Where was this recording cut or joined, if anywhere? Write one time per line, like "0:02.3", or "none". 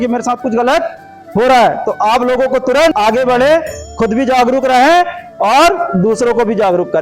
0:02.9